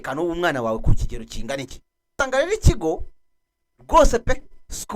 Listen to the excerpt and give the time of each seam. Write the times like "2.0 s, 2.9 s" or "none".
2.2 s